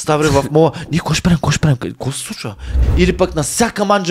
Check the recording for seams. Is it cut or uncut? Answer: cut